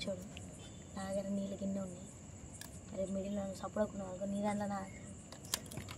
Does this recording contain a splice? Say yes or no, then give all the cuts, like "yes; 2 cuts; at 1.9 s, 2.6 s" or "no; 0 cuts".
no; 0 cuts